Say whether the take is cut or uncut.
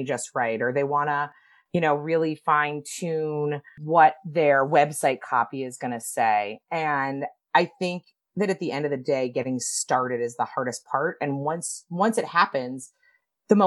uncut